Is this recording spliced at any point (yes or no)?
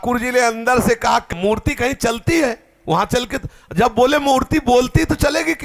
no